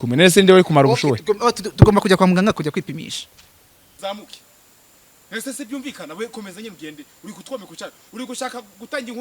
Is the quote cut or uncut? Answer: cut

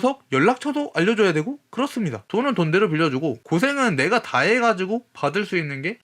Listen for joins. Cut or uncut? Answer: cut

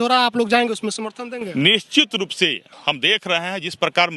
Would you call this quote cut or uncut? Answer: uncut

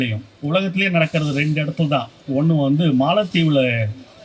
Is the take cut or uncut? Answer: uncut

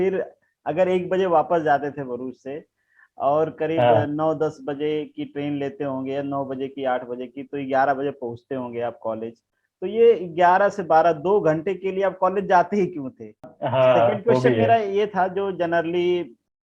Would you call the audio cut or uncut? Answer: cut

